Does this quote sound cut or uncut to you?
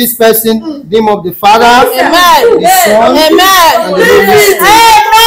uncut